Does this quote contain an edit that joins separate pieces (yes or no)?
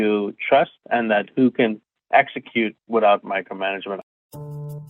yes